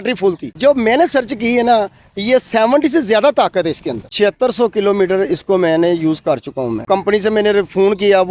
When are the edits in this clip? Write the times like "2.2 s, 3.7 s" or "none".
4.0 s, 6.8 s